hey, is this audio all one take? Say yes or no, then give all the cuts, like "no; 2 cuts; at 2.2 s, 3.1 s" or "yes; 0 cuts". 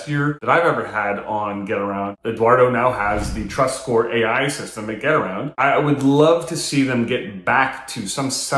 no; 2 cuts; at 2.1 s, 5.5 s